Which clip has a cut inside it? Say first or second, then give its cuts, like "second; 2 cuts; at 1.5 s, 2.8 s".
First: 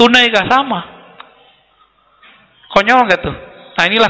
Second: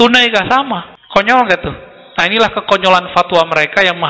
second; 1 cut; at 0.9 s